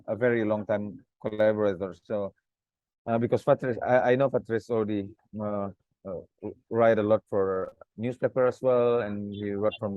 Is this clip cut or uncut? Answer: cut